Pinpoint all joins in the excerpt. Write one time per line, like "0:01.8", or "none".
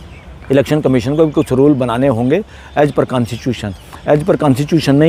none